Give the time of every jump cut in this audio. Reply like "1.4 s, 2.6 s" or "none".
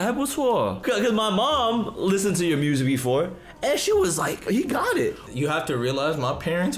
0.8 s, 4.4 s, 5.2 s